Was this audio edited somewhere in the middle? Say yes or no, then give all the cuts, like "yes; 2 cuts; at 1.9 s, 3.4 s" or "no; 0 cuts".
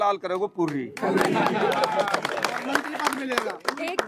no; 0 cuts